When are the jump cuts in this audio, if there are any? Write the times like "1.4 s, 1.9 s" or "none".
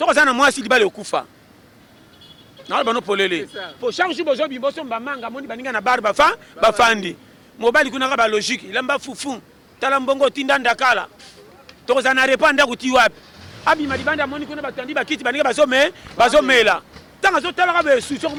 none